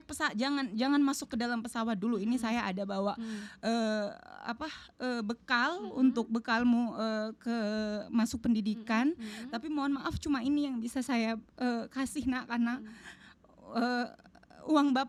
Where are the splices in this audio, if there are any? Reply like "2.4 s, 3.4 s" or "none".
none